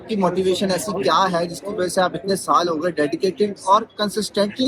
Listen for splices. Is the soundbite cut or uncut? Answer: uncut